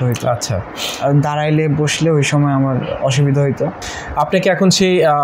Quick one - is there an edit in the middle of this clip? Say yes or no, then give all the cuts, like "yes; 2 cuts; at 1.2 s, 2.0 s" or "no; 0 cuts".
yes; 1 cut; at 3.8 s